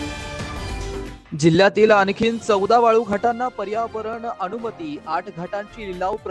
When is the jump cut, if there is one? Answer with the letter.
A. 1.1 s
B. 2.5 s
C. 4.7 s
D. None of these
D